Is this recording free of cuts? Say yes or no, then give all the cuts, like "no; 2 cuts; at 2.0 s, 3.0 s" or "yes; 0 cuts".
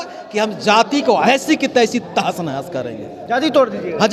yes; 0 cuts